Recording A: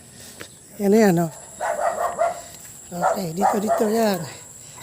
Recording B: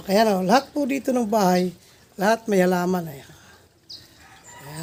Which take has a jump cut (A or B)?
A